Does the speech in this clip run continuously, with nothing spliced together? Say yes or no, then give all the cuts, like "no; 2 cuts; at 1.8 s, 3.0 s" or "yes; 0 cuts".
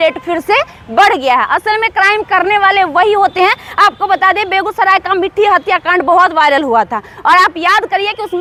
yes; 0 cuts